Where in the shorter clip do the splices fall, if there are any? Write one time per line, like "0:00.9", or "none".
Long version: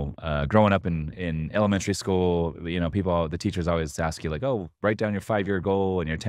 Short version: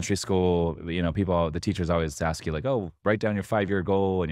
none